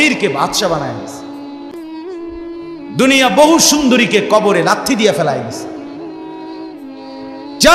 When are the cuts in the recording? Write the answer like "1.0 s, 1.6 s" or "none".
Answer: 1.0 s, 2.6 s